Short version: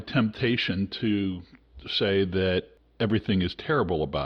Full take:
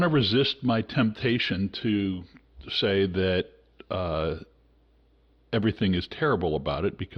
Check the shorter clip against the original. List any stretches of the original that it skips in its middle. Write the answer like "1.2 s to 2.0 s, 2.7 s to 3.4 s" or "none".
3.6 s to 5.3 s